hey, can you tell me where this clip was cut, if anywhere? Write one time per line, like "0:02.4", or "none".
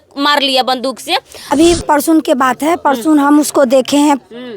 0:01.5